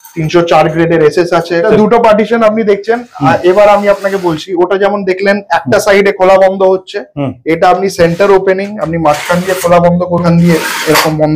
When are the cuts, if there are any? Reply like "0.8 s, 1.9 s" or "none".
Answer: 1.7 s, 10.2 s

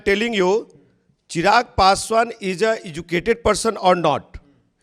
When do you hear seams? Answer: none

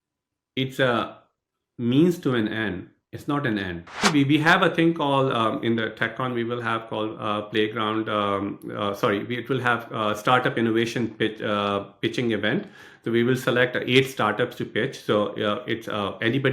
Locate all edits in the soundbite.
4.0 s

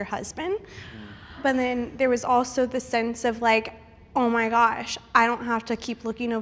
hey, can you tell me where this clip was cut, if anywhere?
1.4 s

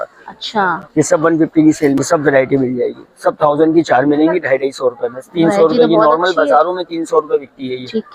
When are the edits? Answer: 2.0 s

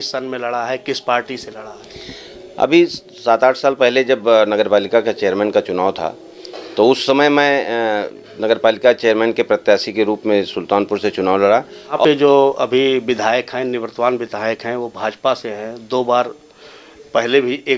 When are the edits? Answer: 12.0 s

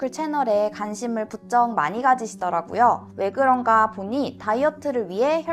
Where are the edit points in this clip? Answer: none

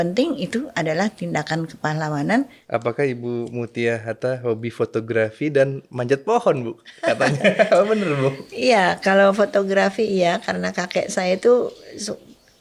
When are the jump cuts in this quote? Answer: 2.6 s

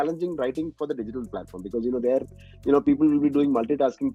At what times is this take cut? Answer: none

